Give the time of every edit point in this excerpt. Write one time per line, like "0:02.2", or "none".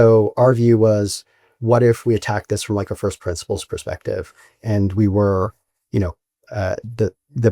none